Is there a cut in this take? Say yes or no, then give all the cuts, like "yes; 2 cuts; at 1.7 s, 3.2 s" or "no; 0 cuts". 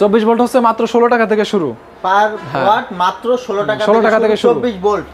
no; 0 cuts